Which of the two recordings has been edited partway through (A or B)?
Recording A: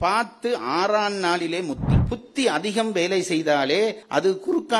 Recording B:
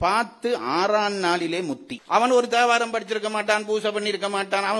A